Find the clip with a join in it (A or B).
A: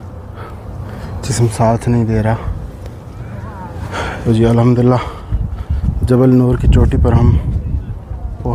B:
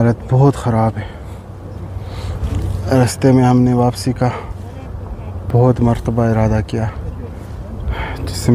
A